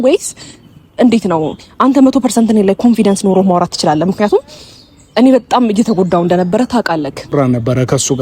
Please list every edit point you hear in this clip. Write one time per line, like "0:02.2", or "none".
0:07.3